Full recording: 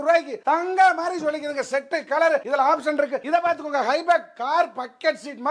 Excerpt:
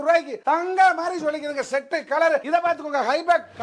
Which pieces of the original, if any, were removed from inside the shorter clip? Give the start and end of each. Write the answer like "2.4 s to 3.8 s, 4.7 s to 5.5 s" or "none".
2.4 s to 3.2 s